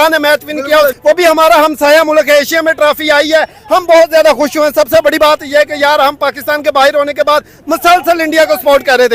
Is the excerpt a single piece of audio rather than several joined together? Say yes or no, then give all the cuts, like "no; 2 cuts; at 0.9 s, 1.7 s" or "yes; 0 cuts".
yes; 0 cuts